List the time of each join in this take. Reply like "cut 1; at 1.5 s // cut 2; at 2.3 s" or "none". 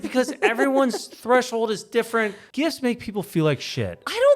cut 1; at 2.4 s